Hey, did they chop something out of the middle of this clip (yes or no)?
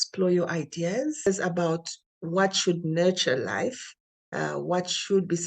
yes